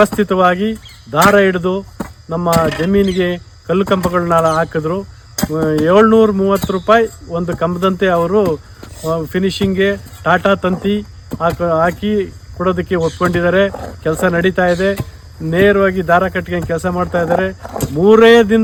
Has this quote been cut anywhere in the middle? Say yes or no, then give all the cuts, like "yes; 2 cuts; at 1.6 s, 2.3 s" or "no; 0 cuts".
no; 0 cuts